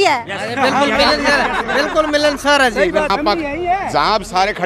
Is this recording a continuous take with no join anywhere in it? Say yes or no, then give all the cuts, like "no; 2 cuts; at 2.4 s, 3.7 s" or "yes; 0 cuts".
no; 1 cut; at 3.1 s